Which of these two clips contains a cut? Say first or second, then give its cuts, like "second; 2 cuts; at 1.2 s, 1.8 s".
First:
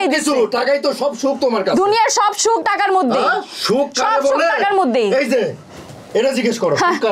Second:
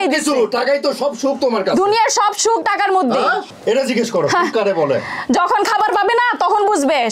second; 1 cut; at 3.5 s